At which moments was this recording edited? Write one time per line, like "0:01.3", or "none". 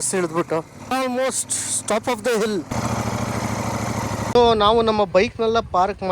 0:00.9
0:02.7
0:04.3